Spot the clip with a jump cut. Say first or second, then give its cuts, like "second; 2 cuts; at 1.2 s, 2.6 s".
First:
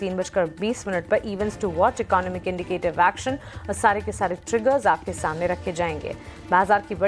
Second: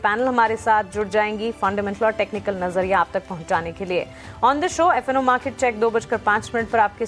first; 1 cut; at 4.4 s